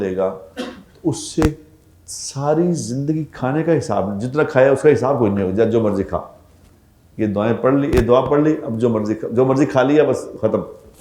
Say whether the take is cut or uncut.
uncut